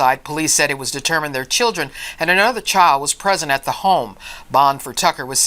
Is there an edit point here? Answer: yes; 1 cut; at 4.3 s

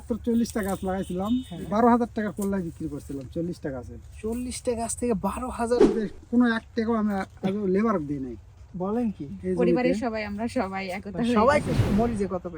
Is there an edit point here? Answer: yes; 3 cuts; at 1.5 s, 5.9 s, 11.7 s

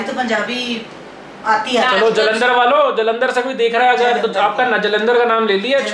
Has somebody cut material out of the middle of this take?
no; 0 cuts

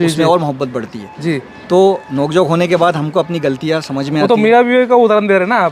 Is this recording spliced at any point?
no; 0 cuts

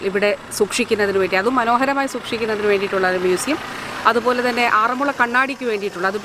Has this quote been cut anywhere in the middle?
no; 0 cuts

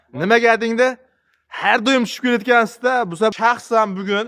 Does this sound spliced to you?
yes; 1 cut; at 3.3 s

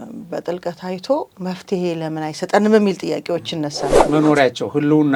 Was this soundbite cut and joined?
yes; 1 cut; at 3.9 s

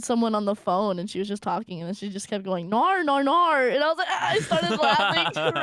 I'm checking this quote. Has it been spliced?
no; 0 cuts

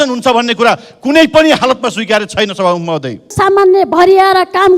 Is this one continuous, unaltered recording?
no; 1 cut; at 3.3 s

